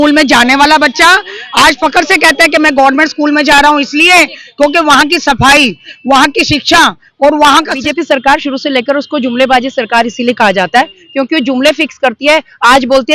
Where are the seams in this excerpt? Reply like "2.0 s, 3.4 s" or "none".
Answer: 2.6 s, 7.8 s